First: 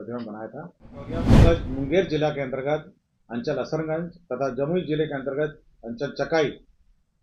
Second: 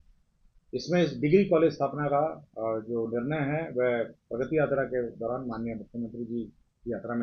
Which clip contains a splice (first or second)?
first